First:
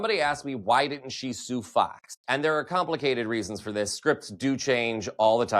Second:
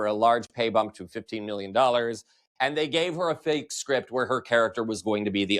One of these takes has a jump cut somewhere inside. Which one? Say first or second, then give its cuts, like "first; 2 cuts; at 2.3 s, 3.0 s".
first; 1 cut; at 2.1 s